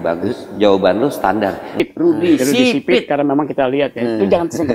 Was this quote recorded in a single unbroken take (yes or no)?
no